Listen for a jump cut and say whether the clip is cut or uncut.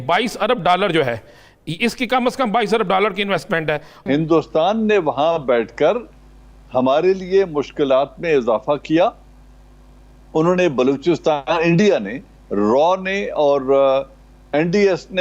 cut